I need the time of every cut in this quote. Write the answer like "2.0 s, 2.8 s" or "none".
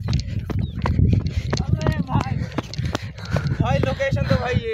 none